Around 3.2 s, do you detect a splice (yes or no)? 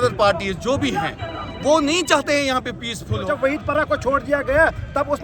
yes